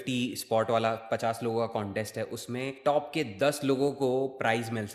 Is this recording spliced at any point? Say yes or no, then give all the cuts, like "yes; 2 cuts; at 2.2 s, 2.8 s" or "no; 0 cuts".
no; 0 cuts